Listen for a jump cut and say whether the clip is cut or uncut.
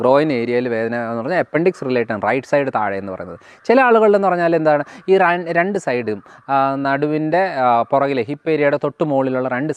uncut